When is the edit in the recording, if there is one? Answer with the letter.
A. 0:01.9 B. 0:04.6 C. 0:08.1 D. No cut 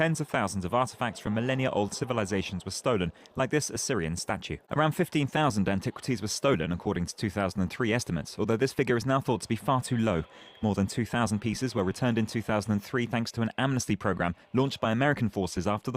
B